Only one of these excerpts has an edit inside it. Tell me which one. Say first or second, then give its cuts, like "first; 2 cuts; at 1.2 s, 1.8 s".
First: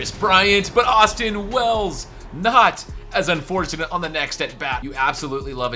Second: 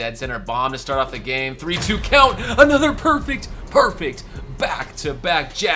first; 1 cut; at 4.8 s